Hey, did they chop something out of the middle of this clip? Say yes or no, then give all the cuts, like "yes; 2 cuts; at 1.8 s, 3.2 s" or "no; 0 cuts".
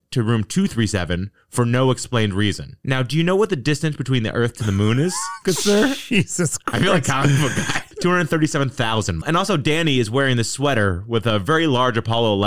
yes; 2 cuts; at 7.9 s, 9.2 s